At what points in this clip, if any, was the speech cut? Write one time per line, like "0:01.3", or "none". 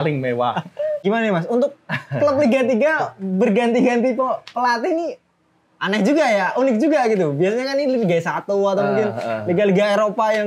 0:01.0